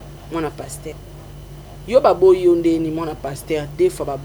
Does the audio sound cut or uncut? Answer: cut